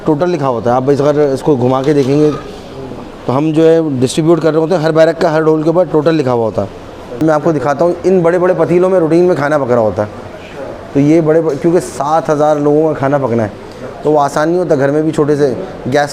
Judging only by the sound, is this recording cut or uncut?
cut